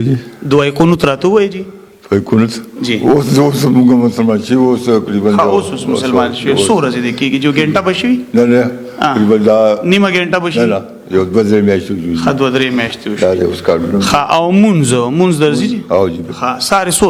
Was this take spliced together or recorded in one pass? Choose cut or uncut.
uncut